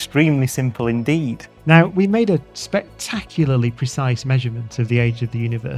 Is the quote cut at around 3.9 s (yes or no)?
no